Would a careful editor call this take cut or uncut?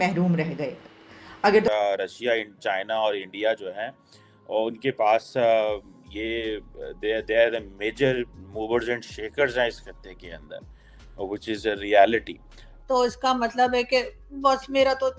cut